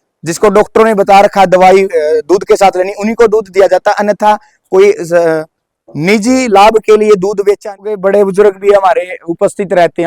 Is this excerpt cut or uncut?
cut